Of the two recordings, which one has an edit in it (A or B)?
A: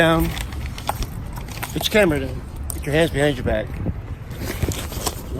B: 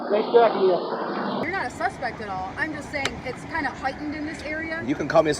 B